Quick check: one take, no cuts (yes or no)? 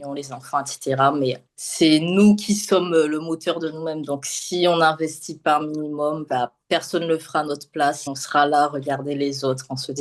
no